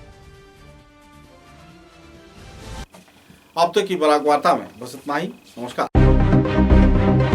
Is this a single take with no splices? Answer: yes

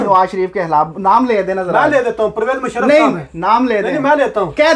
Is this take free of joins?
yes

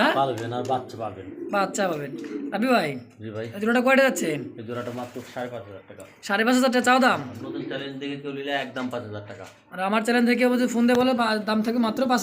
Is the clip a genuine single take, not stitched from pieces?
yes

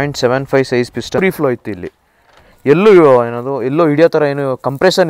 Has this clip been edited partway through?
yes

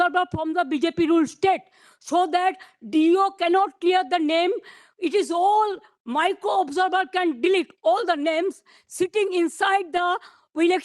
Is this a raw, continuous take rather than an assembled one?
yes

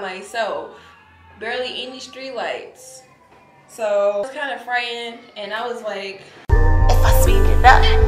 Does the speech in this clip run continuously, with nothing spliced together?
no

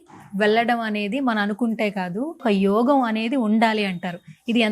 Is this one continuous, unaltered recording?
no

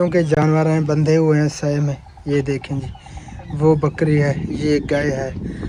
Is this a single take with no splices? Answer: yes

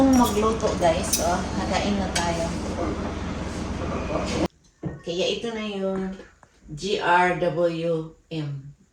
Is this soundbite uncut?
no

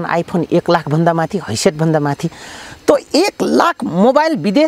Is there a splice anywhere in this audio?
no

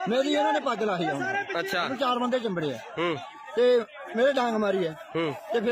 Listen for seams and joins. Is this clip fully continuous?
yes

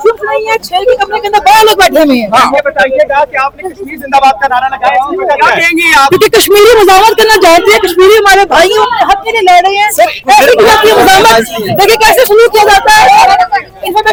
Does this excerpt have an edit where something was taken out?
no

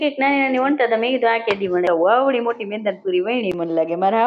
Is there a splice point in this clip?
yes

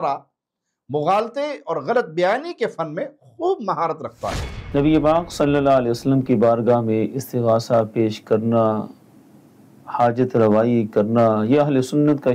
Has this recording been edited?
yes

